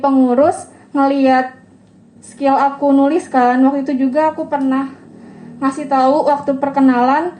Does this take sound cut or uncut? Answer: uncut